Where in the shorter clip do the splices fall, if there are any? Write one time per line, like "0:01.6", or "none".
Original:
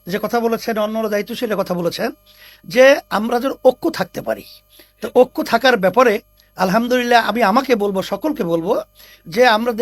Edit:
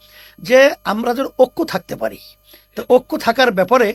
none